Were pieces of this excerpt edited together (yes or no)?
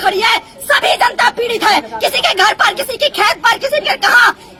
no